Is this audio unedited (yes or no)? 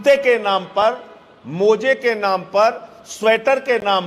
yes